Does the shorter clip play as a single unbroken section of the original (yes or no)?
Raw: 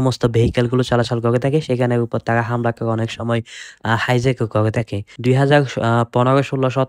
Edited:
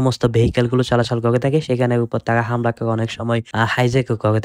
no